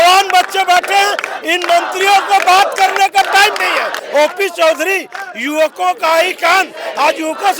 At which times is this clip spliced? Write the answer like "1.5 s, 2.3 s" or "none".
4.0 s